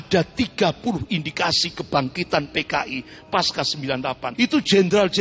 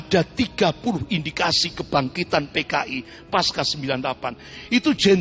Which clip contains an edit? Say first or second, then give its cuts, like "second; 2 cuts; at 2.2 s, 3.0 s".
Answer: first; 1 cut; at 4.3 s